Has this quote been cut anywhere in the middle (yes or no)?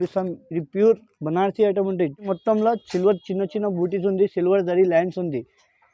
yes